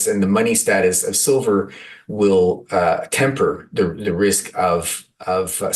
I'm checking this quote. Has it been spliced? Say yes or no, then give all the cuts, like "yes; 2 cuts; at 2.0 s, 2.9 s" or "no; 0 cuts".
no; 0 cuts